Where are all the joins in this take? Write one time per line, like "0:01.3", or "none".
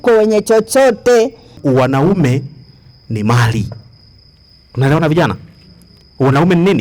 0:01.6